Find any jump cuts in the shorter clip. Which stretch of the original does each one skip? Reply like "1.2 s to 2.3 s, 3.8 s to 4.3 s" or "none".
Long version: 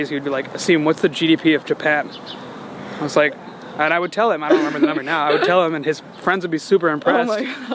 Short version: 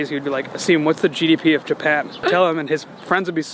2.2 s to 5.4 s